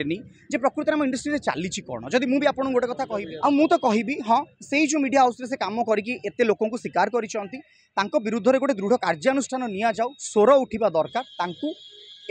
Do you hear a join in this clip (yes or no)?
yes